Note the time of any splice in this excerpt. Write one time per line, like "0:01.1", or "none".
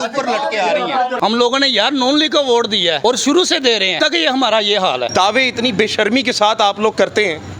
0:01.2
0:03.0
0:03.9
0:05.1

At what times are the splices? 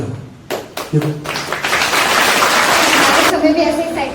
0:03.2

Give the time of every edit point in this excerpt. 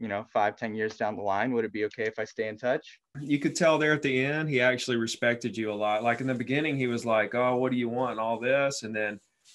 0:03.1

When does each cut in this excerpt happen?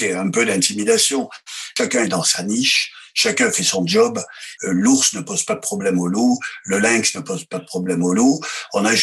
0:01.7
0:04.5

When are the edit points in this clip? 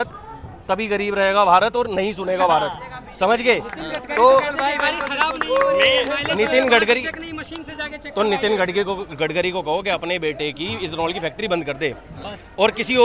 none

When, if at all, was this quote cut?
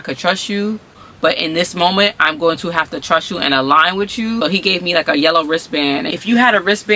0:01.0
0:04.4
0:06.1

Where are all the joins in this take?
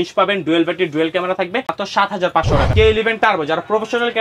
0:01.7
0:02.7

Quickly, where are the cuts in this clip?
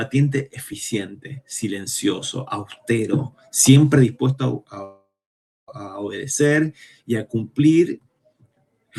none

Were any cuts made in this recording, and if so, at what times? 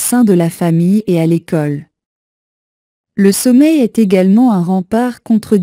0:03.7

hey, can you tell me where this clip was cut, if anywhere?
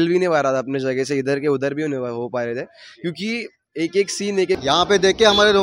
0:04.6

